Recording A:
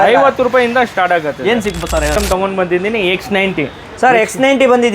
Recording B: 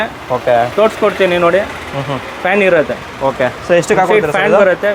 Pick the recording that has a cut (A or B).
A